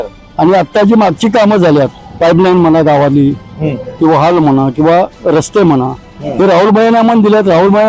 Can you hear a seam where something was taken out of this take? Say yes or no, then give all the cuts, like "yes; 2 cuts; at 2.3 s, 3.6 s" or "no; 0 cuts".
yes; 1 cut; at 2.0 s